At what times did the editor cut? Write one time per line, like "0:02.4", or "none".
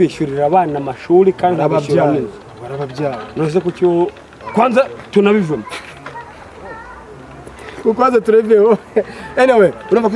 none